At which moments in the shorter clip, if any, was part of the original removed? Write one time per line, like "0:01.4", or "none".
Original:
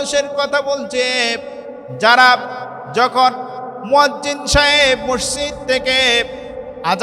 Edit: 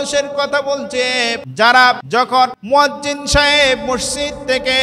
0:01.4
0:02.3